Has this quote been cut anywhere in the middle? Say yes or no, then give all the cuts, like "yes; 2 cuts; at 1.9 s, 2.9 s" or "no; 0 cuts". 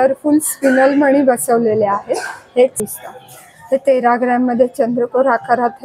yes; 1 cut; at 2.8 s